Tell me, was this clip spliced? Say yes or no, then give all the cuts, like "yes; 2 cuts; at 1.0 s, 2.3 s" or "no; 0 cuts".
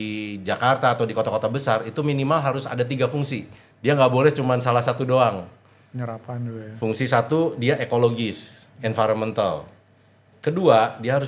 no; 0 cuts